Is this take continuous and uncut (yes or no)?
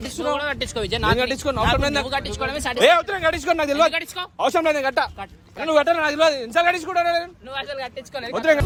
yes